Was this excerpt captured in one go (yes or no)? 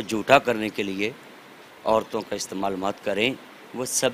yes